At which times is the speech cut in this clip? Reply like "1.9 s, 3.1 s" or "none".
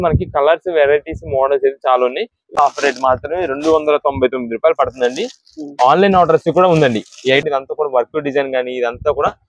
2.5 s, 7.4 s